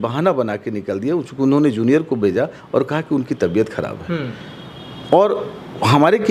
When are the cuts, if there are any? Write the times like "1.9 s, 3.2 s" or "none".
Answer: none